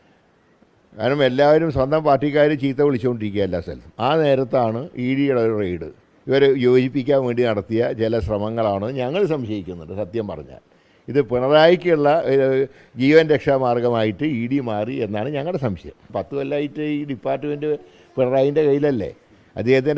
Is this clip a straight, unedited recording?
no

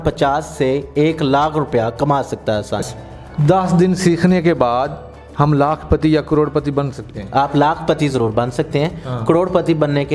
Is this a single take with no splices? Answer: no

